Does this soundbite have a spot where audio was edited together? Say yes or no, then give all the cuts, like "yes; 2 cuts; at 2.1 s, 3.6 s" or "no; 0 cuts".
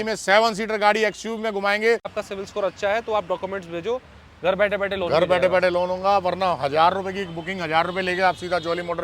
yes; 1 cut; at 2.2 s